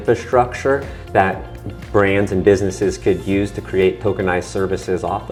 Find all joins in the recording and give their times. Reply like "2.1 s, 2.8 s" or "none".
none